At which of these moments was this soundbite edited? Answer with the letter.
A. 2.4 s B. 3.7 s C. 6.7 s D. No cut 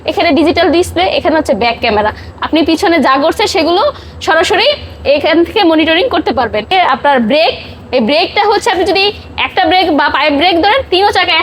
C